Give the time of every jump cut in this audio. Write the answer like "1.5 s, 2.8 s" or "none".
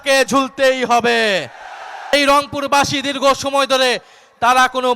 2.1 s